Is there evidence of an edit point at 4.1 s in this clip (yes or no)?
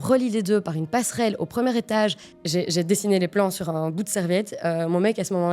no